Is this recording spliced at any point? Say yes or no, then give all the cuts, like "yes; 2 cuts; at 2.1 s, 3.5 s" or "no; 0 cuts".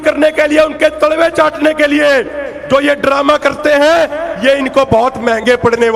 no; 0 cuts